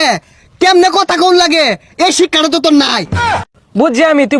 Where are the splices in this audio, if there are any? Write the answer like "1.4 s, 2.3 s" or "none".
3.4 s